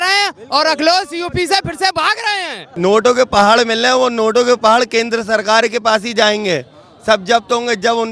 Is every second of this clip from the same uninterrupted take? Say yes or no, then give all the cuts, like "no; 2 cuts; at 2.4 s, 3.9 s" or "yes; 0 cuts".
no; 1 cut; at 2.6 s